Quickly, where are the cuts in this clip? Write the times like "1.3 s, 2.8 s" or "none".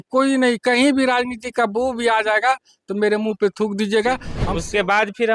4.3 s